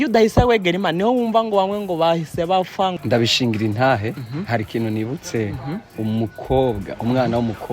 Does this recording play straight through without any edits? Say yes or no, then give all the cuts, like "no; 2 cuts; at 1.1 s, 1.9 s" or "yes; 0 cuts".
no; 1 cut; at 2.9 s